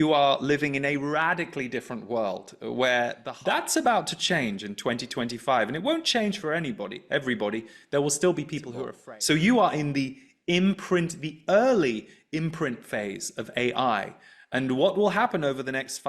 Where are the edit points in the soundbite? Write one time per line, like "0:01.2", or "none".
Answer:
0:03.2
0:08.9